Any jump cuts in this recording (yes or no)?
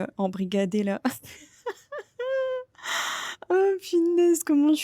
no